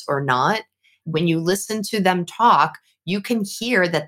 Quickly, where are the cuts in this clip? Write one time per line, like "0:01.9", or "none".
0:01.0